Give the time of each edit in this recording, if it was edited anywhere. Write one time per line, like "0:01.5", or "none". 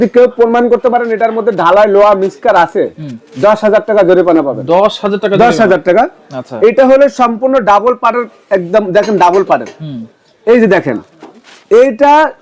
none